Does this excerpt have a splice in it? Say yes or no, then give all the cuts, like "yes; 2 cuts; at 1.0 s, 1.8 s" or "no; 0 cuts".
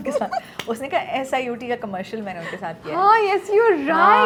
no; 0 cuts